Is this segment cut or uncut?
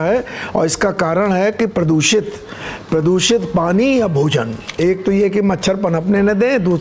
cut